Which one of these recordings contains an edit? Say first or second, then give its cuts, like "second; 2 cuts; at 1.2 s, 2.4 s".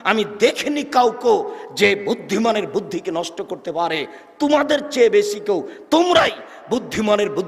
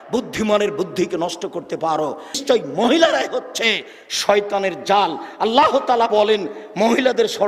second; 1 cut; at 2.4 s